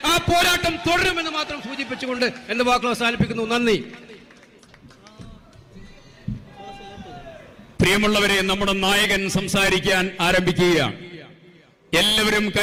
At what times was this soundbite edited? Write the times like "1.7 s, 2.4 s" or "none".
none

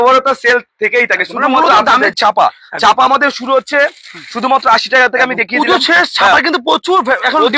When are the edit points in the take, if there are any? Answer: 2.1 s

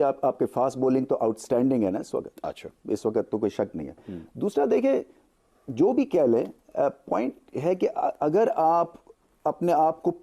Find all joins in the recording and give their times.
none

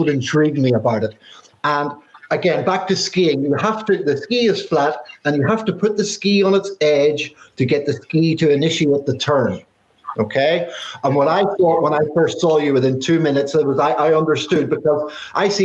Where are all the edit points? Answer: 2.1 s

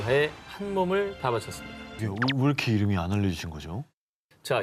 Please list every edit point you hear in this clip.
2.0 s

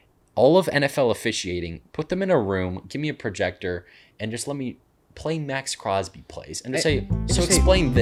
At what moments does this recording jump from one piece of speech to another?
none

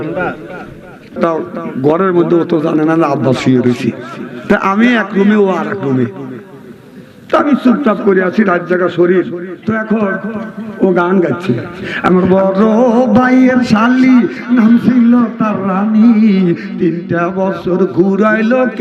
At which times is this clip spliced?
1.2 s, 9.5 s

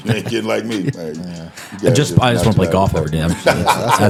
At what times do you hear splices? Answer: none

